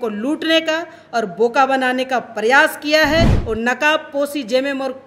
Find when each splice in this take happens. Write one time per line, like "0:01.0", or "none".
0:03.4